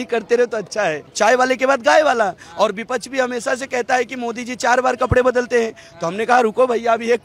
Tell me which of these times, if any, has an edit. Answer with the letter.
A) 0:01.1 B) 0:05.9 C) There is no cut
A